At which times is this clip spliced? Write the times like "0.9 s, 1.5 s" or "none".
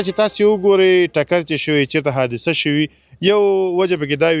none